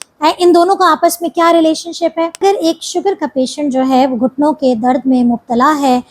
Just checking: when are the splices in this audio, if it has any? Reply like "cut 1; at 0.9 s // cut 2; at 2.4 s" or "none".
cut 1; at 2.4 s